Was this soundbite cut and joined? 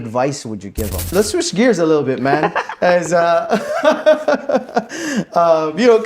yes; 1 cut; at 1.1 s

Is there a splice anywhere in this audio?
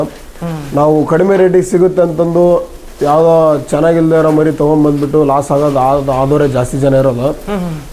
no; 0 cuts

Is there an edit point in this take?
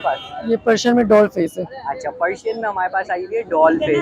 no; 0 cuts

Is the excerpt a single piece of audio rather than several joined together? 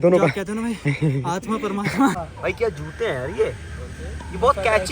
no; 1 cut; at 2.2 s

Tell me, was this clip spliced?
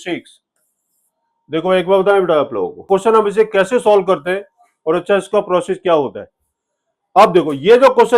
yes; 1 cut; at 2.8 s

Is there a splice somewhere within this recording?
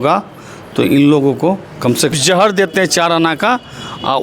yes; 1 cut; at 2.1 s

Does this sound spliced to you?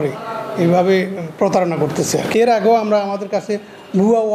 yes; 1 cut; at 2.3 s

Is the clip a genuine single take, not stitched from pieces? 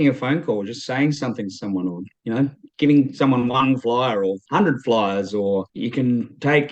yes; 0 cuts

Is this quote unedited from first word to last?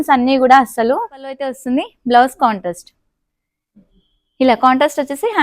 no; 1 cut; at 1.5 s

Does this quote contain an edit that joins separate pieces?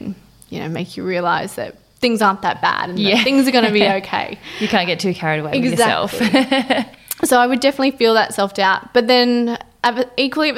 no; 0 cuts

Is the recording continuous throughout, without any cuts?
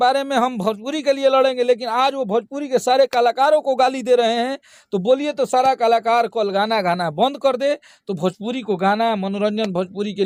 yes; 0 cuts

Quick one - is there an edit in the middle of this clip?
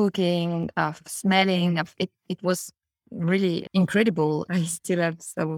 yes; 2 cuts; at 3.7 s, 4.5 s

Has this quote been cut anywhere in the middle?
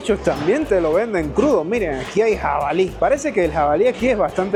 no; 0 cuts

